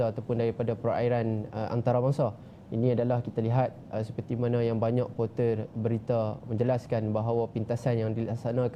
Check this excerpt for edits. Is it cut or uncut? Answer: uncut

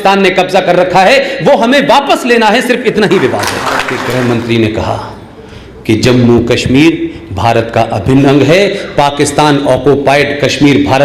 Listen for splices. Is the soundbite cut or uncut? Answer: cut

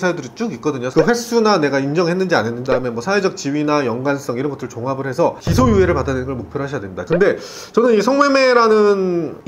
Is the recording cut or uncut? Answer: cut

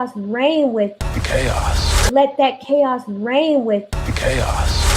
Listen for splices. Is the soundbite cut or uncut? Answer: cut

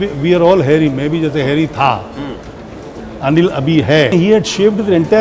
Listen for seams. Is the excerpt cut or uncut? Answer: cut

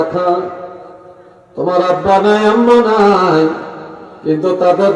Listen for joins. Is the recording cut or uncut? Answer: uncut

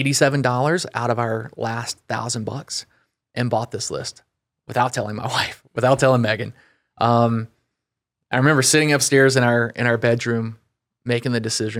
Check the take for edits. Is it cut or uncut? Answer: uncut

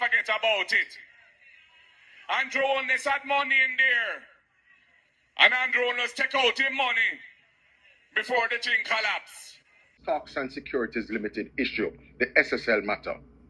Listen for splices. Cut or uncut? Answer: cut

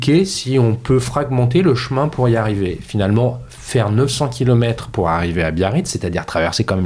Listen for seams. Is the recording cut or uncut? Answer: uncut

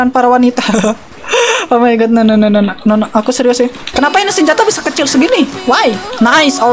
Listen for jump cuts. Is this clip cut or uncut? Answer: uncut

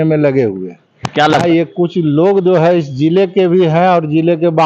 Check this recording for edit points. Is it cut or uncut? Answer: cut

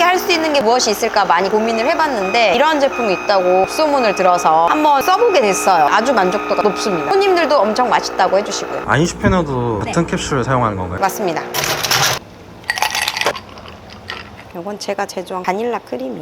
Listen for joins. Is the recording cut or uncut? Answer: cut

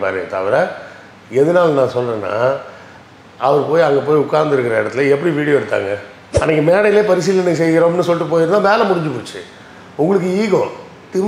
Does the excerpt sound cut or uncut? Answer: cut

